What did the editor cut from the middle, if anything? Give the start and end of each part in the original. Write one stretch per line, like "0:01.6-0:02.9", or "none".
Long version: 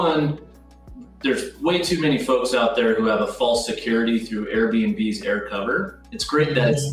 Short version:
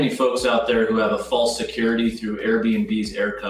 none